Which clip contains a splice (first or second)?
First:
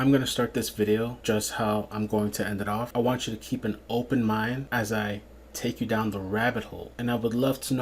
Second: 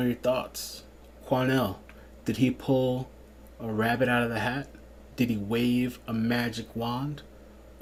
first